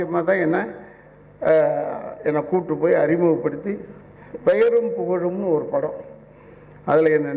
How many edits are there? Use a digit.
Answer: 0